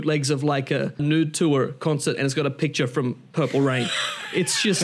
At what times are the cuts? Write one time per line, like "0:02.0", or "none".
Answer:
0:01.0